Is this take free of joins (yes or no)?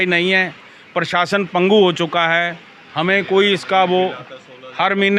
yes